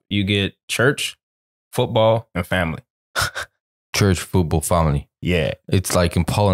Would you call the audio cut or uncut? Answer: uncut